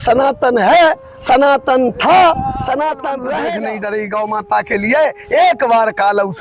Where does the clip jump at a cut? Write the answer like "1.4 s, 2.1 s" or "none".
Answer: 3.4 s